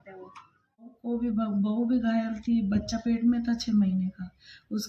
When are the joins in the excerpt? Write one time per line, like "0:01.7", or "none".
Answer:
0:01.0